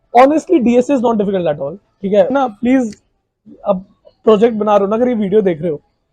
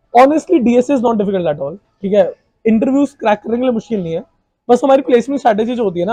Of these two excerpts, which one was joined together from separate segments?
first; 1 cut; at 2.3 s

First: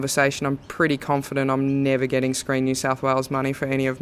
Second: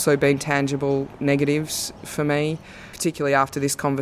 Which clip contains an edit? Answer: second; 1 cut; at 2.8 s

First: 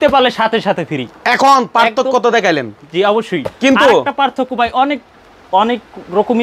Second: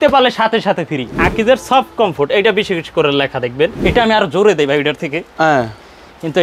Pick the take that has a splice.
second; 2 cuts; at 1.2 s, 3.8 s

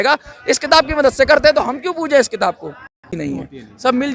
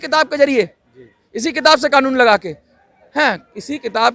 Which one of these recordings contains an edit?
first; 1 cut; at 3.1 s

